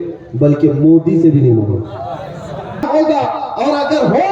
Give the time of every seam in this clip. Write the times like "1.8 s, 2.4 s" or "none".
2.8 s